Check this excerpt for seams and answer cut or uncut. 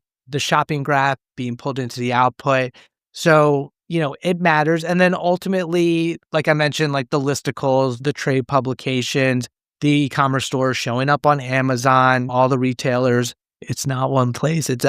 cut